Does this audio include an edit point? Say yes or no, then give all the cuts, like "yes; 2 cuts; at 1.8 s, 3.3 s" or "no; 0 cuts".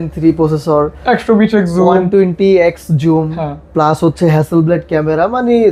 no; 0 cuts